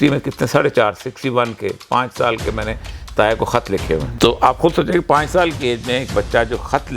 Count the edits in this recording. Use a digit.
1